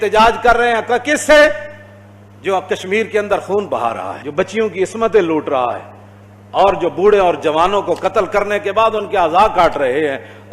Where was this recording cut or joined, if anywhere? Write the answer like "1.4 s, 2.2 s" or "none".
4.2 s